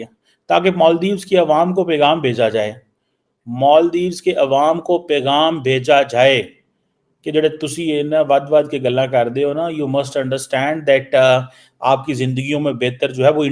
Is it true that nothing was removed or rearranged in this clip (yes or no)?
yes